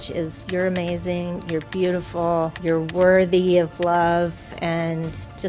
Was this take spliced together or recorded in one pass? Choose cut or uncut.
cut